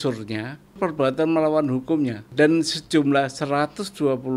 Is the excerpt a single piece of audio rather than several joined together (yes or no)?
no